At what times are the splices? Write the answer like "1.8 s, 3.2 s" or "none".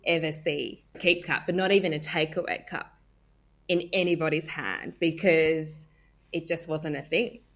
1.0 s